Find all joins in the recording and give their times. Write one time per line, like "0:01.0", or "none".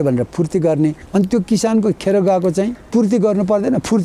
0:01.0
0:02.8

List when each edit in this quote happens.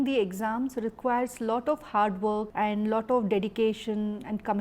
0:02.5

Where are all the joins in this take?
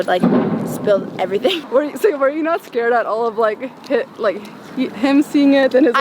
0:01.6

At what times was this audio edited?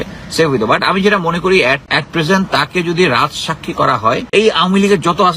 0:01.9
0:04.2

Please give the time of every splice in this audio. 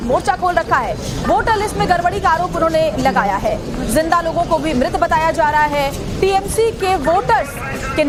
none

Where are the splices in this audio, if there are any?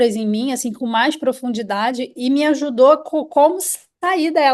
none

